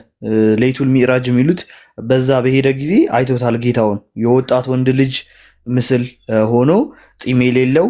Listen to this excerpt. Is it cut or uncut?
uncut